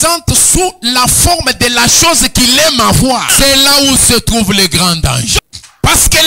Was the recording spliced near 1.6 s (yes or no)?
no